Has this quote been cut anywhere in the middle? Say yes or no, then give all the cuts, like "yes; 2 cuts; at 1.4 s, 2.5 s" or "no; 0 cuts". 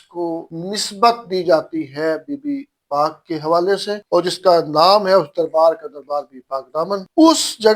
no; 0 cuts